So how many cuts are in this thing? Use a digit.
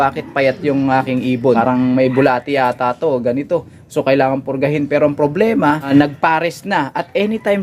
2